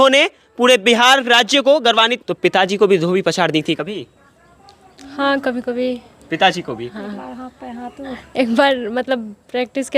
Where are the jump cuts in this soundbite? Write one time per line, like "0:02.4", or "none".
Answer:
0:02.2

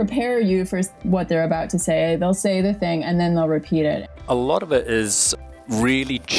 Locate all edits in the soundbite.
0:04.1

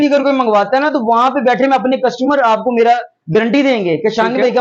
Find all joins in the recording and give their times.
none

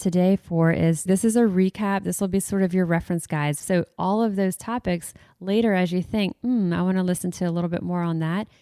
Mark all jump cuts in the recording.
0:01.1
0:03.6

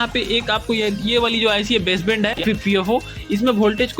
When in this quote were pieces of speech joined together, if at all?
0:02.4

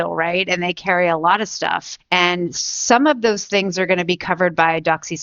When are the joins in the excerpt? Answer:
0:01.9

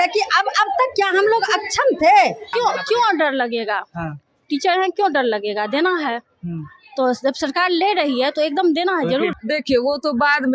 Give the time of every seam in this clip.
0:02.5
0:09.4

